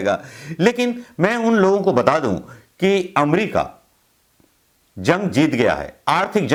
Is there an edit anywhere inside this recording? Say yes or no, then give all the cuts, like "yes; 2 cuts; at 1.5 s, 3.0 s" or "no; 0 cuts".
no; 0 cuts